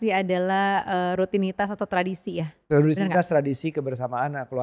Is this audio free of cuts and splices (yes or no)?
yes